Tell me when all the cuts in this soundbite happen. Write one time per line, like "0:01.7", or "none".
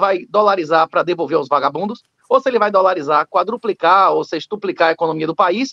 none